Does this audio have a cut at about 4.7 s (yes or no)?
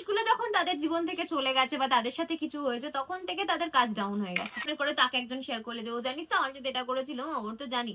yes